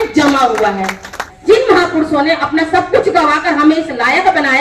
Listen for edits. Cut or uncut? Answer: cut